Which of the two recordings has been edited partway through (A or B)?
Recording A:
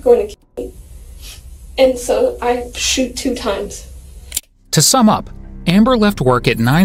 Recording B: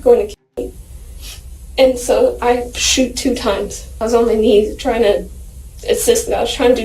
B